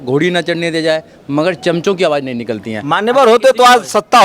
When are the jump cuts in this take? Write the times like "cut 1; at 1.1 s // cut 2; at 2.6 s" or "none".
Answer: none